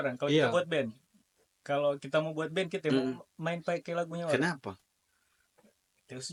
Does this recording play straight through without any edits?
yes; 0 cuts

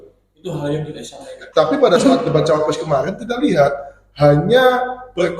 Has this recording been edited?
yes; 1 cut; at 1.4 s

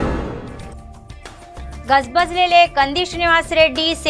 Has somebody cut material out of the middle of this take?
yes; 1 cut; at 1.8 s

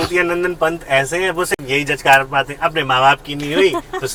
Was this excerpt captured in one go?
yes; 0 cuts

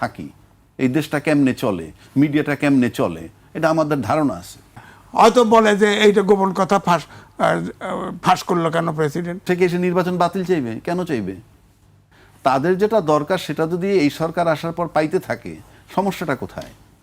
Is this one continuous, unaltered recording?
no; 2 cuts; at 4.9 s, 9.4 s

